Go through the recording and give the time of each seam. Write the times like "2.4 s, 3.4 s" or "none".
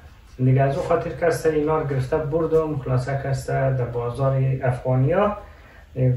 none